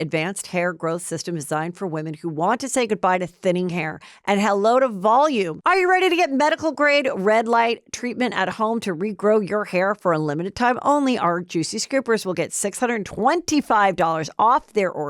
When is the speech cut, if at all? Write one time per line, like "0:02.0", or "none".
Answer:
0:05.5